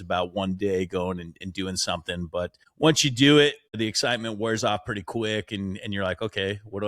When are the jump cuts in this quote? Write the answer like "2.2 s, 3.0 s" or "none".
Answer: 2.6 s, 3.8 s